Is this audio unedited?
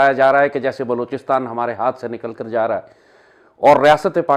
yes; 0 cuts

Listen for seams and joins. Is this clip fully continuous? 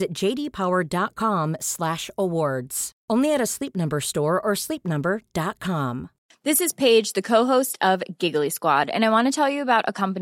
yes; 0 cuts

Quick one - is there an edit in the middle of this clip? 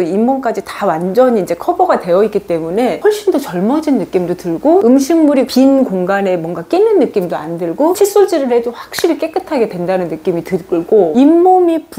yes; 3 cuts; at 3.0 s, 4.8 s, 11.1 s

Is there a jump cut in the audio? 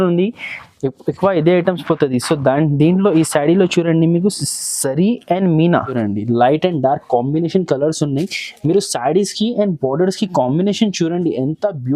yes; 1 cut; at 5.9 s

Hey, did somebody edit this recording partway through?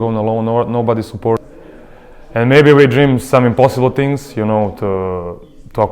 yes; 1 cut; at 1.5 s

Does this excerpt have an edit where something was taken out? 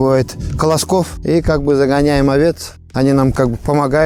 no; 0 cuts

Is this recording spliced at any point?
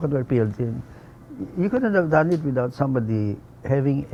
no; 0 cuts

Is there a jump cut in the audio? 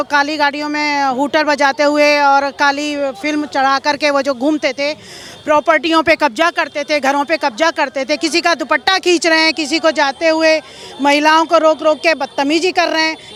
no; 0 cuts

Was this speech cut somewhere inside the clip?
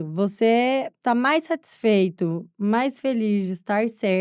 no; 0 cuts

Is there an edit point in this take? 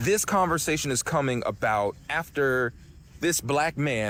no; 0 cuts

